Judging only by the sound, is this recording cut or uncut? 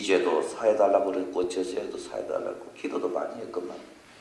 uncut